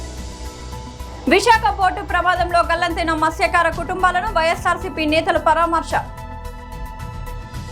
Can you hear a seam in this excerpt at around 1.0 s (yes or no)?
yes